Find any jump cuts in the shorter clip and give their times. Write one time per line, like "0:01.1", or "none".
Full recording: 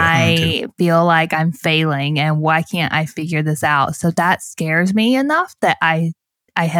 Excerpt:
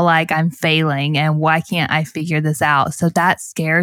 none

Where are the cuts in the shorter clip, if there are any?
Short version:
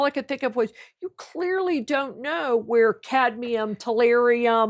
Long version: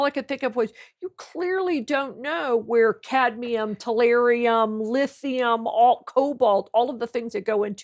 none

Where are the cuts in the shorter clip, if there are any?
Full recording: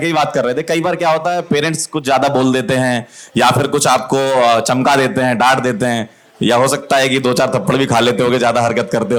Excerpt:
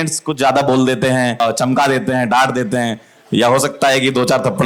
0:01.4

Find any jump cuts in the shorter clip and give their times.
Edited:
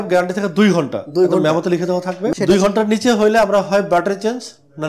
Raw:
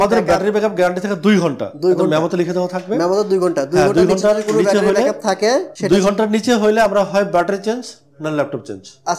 0:02.3

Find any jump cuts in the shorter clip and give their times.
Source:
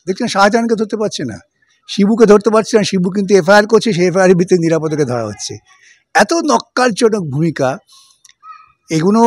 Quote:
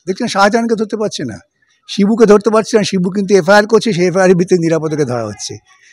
none

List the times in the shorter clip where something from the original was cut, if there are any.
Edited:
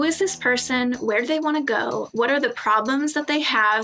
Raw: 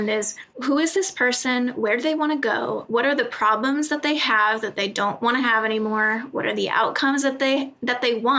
none

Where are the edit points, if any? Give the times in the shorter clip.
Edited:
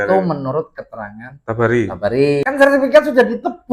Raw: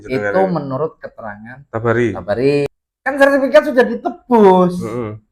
0:02.5

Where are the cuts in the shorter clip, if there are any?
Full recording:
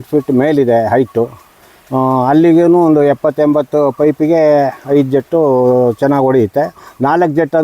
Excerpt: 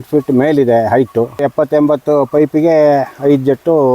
0:01.5

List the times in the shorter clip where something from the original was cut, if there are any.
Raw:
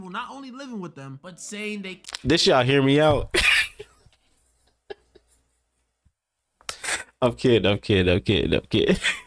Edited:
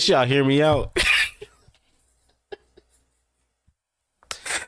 none

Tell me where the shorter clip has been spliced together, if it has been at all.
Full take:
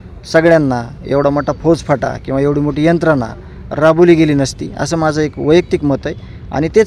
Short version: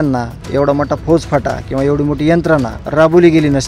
0:02.8

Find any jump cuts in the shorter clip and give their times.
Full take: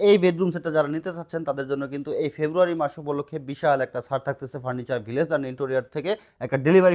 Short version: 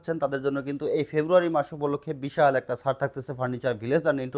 none

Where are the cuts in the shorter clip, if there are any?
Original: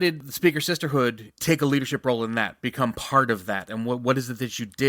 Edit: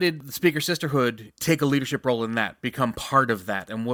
none

